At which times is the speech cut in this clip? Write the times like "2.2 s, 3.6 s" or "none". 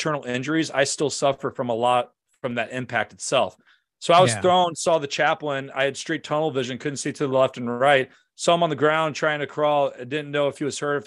none

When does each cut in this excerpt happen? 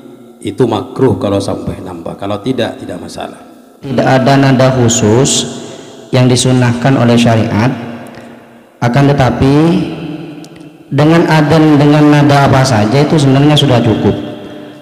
3.9 s

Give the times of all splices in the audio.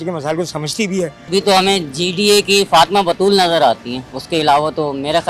1.3 s, 4.1 s

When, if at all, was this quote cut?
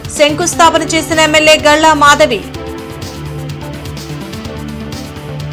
none

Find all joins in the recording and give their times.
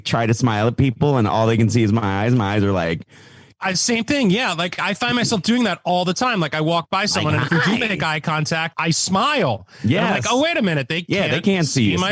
3.6 s

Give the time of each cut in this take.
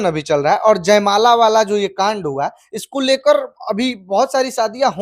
none

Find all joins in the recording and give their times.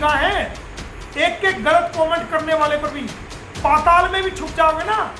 none

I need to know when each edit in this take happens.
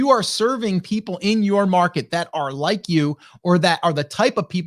none

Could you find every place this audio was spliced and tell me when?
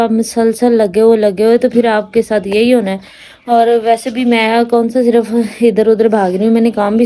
none

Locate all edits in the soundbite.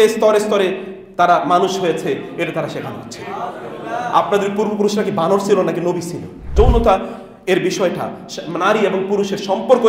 6.5 s

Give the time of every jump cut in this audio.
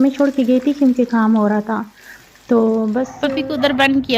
3.1 s

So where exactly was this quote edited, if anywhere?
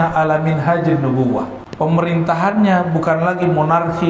1.6 s

